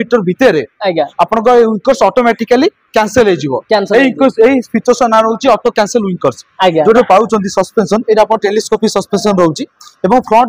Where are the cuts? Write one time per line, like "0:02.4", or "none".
0:07.0